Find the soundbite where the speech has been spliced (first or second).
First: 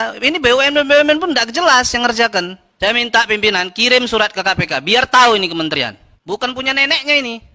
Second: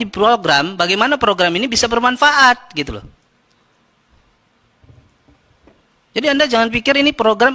first